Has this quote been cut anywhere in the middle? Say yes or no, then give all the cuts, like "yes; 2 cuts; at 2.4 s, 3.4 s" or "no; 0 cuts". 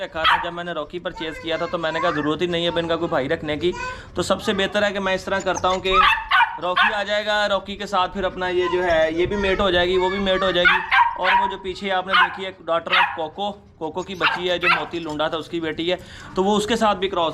no; 0 cuts